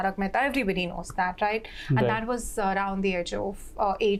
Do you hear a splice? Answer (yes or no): no